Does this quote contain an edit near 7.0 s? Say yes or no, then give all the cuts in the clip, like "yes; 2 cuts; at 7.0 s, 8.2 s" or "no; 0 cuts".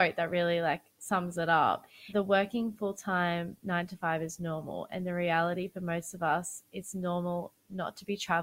no; 2 cuts; at 0.9 s, 2.0 s